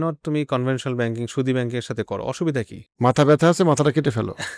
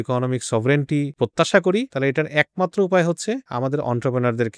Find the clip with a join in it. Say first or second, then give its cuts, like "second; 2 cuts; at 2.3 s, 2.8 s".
second; 3 cuts; at 1.1 s, 1.9 s, 3.5 s